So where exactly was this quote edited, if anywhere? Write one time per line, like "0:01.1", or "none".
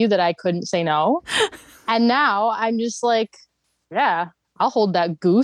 0:01.7